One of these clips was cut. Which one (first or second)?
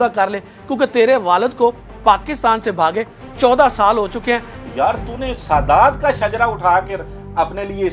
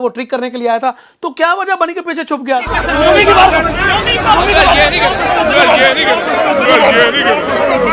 first